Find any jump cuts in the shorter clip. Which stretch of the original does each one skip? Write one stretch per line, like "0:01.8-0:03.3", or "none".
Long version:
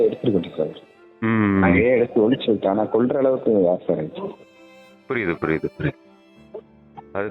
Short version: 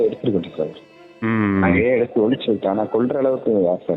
none

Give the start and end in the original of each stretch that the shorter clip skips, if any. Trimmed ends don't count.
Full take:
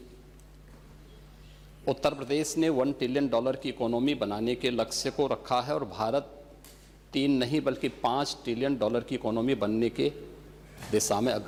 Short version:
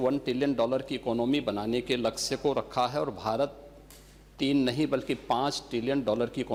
none

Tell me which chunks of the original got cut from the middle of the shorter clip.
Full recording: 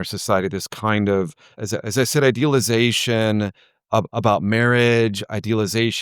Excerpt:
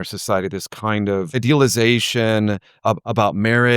0:01.4-0:02.3
0:03.6-0:03.8

